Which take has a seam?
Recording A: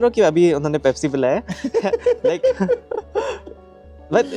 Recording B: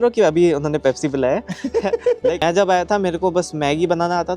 B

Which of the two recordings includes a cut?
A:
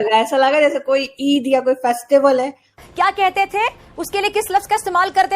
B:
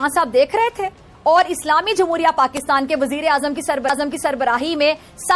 A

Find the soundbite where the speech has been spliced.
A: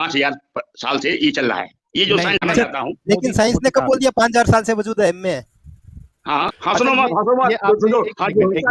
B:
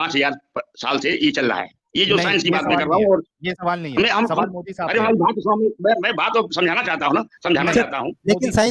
A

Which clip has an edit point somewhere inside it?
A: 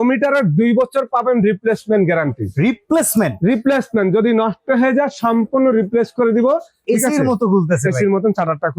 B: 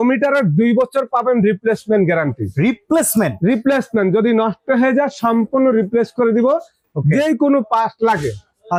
A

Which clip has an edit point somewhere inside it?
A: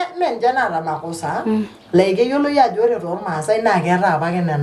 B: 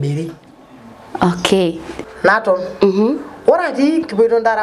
B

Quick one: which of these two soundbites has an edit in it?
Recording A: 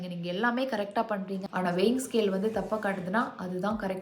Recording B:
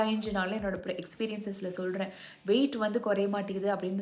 A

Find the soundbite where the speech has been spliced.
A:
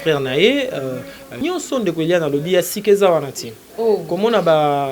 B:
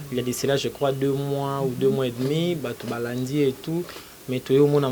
A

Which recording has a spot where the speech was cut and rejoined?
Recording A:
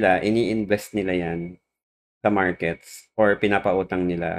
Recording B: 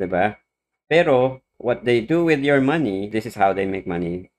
B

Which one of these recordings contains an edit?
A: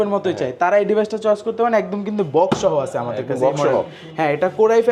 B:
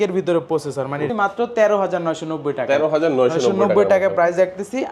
B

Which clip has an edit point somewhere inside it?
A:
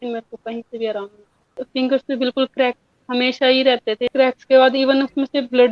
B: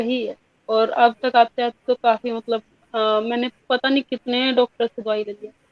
A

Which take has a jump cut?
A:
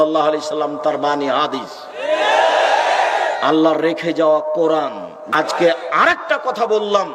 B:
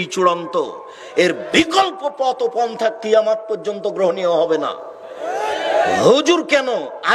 A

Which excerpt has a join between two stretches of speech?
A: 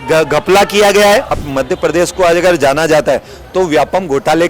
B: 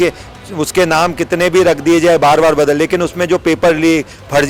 A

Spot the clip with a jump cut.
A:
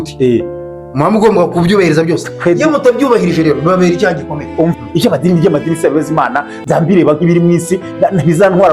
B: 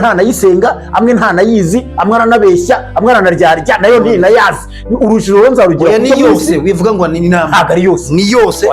A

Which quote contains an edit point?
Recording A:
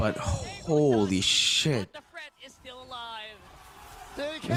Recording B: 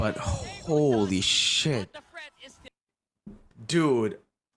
B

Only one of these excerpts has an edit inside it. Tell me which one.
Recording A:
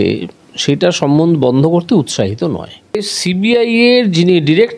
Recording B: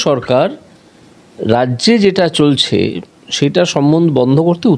A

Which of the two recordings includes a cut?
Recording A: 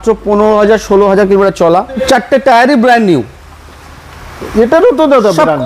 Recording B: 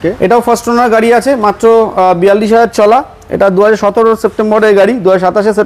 A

